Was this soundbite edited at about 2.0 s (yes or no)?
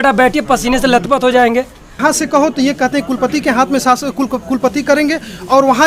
yes